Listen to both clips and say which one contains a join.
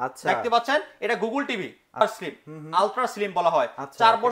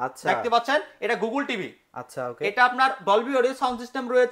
first; 1 cut; at 2.0 s

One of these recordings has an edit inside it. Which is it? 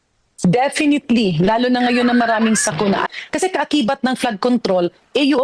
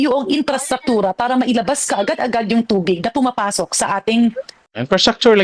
first; 1 cut; at 3.1 s

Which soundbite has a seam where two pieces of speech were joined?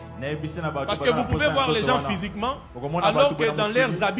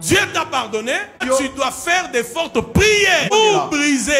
second; 2 cuts; at 1.2 s, 3.3 s

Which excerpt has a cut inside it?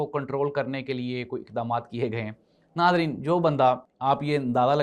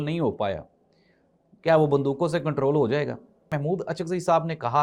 second; 1 cut; at 3.5 s

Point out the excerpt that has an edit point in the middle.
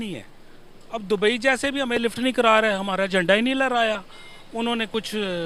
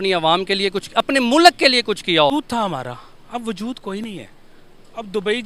second; 1 cut; at 2.3 s

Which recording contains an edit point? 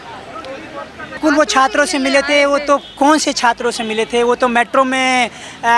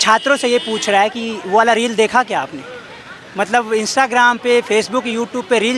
first; 1 cut; at 1.2 s

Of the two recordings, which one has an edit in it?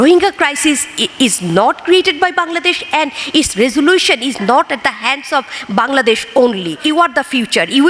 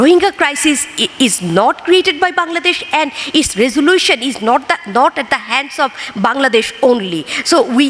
first; 2 cuts; at 4.4 s, 6.8 s

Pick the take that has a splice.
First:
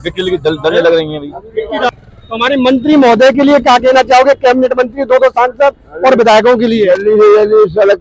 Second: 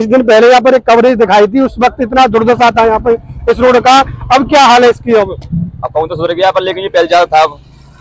first; 1 cut; at 1.9 s

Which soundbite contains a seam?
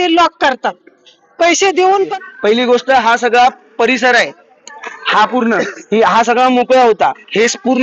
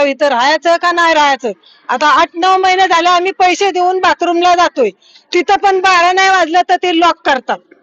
first; 1 cut; at 2.1 s

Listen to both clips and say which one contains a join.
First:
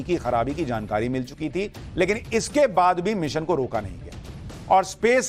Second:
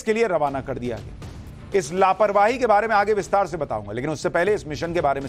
first; 1 cut; at 2.5 s

